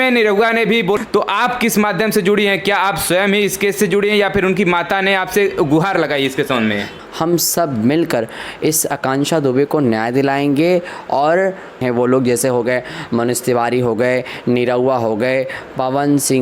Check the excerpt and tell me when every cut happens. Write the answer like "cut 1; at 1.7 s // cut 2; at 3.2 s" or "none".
cut 1; at 1.0 s // cut 2; at 7.0 s // cut 3; at 11.8 s